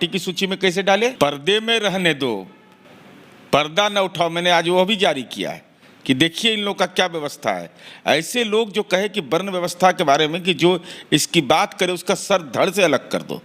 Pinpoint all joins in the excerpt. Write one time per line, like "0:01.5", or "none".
0:01.1